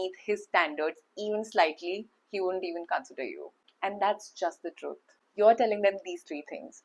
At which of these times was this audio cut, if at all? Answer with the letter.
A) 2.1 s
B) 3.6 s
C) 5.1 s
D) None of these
C